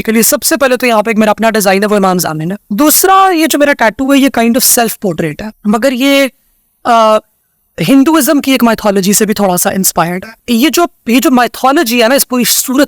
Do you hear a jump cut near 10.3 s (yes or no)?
yes